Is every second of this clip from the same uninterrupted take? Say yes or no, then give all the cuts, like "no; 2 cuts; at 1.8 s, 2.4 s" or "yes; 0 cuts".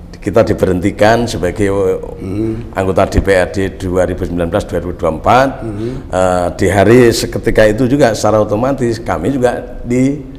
yes; 0 cuts